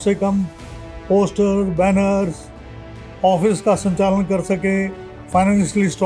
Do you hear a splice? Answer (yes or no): no